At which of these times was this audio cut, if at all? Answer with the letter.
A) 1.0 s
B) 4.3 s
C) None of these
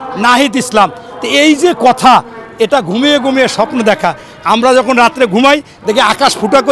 C